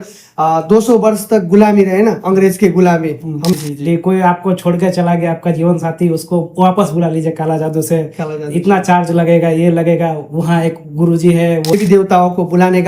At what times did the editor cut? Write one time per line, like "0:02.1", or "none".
0:03.5
0:11.7